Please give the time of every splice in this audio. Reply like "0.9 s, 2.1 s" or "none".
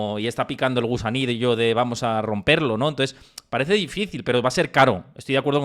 none